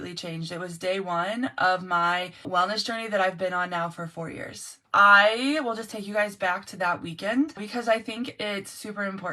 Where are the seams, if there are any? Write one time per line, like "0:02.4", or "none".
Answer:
0:02.5
0:04.8
0:07.7